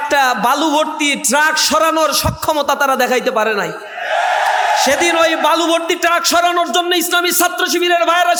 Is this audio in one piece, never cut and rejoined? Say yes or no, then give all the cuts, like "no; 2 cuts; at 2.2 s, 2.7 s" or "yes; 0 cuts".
yes; 0 cuts